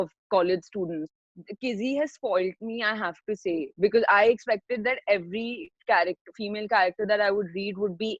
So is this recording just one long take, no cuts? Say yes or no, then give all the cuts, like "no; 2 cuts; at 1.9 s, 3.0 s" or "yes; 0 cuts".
no; 1 cut; at 1.1 s